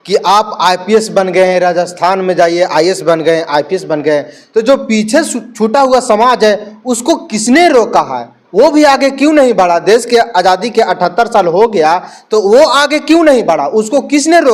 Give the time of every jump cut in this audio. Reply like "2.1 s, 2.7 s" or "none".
none